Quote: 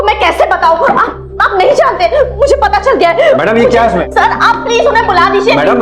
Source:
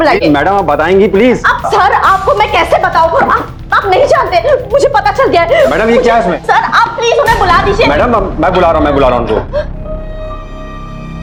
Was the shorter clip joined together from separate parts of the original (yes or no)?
no